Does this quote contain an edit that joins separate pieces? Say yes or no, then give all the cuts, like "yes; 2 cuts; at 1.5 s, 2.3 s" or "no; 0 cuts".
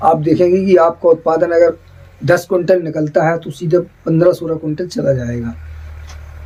no; 0 cuts